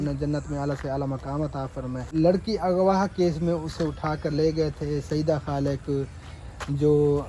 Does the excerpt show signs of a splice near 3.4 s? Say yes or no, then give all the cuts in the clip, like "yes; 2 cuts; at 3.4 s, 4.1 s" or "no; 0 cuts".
no; 1 cut; at 2.1 s